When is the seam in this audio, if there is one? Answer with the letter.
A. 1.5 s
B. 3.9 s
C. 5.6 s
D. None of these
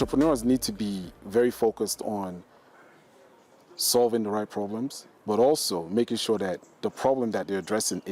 D